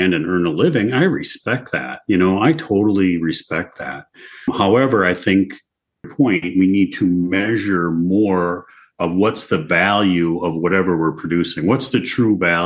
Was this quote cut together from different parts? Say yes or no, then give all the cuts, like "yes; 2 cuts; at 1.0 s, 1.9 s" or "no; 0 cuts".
yes; 2 cuts; at 4.5 s, 6.0 s